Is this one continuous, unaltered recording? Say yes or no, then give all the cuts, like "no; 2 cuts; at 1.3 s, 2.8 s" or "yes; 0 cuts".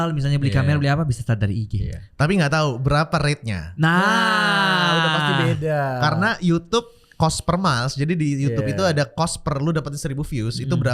yes; 0 cuts